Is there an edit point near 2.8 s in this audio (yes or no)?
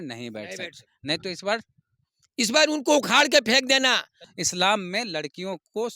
no